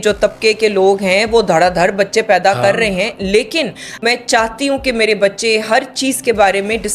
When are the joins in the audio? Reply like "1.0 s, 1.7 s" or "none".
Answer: 3.9 s